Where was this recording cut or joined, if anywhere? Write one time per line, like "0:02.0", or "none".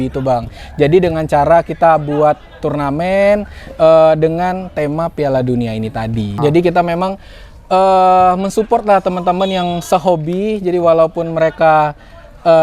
0:06.4